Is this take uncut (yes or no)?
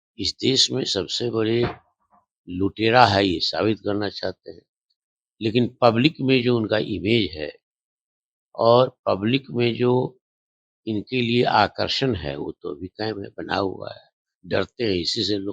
yes